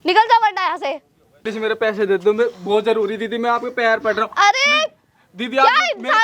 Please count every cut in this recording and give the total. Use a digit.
1